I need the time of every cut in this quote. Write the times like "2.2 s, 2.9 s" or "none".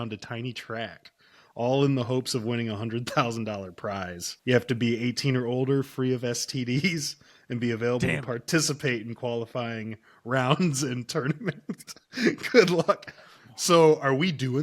4.2 s